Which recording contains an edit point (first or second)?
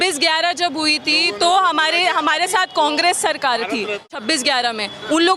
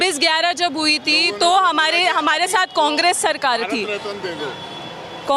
first